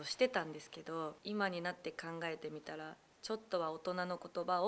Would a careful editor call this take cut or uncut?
cut